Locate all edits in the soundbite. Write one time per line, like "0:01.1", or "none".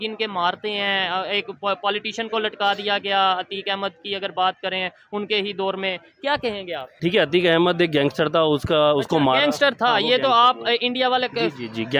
0:06.9